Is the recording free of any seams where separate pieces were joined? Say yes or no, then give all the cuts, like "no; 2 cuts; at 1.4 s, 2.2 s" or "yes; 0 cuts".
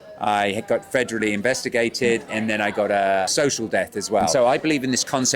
no; 3 cuts; at 2.3 s, 3.3 s, 4.3 s